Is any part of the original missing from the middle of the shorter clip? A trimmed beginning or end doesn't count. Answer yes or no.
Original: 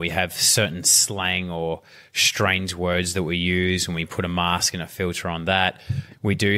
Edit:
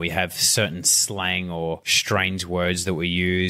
yes